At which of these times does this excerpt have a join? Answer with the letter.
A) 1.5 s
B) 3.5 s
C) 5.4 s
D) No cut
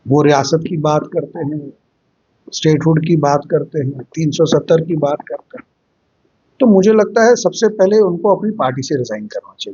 D